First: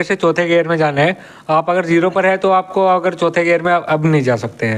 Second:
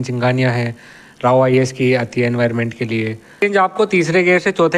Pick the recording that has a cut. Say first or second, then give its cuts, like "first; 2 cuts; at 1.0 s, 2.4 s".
second; 1 cut; at 3.4 s